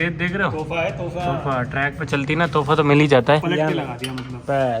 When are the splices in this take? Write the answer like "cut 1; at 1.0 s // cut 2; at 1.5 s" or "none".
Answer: cut 1; at 3.4 s